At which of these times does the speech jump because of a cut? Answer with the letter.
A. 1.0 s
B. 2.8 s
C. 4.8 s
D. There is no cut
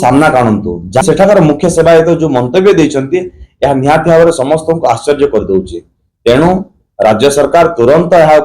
A